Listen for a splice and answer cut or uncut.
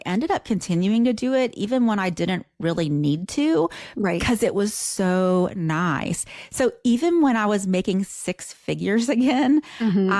uncut